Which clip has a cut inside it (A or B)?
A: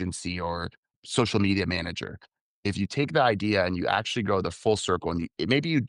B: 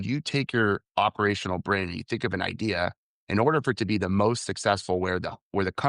A